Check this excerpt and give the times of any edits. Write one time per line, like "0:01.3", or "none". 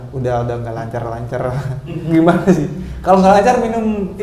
none